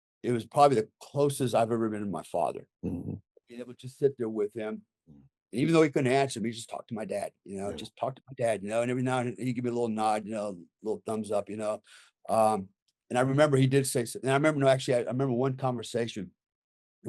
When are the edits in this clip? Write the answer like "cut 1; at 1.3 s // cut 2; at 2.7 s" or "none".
none